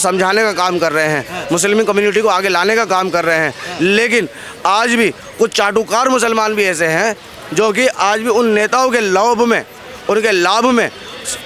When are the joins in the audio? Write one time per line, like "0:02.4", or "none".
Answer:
none

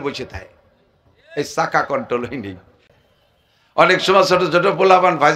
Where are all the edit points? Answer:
0:02.8

